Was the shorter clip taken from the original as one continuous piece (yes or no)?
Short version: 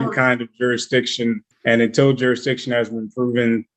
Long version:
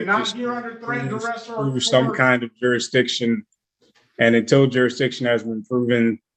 no